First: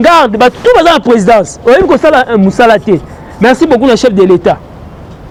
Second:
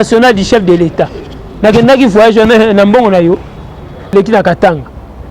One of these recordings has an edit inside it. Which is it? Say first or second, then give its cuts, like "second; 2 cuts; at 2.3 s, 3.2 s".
second; 1 cut; at 4.1 s